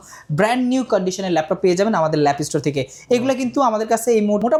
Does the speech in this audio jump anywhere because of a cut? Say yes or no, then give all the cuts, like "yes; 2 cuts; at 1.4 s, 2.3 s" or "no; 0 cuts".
no; 0 cuts